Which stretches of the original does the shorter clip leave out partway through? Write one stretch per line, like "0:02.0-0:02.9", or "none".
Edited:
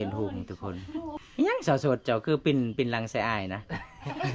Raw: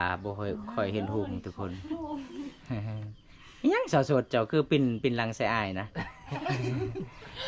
0:02.1-0:03.4